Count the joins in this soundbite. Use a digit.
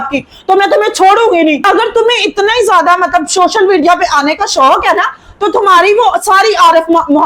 1